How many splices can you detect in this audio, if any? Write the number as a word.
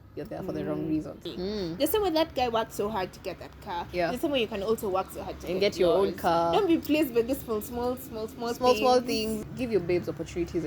two